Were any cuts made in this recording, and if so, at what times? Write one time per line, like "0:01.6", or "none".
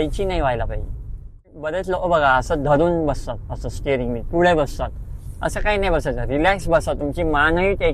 0:01.5